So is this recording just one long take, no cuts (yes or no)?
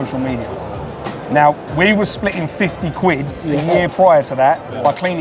yes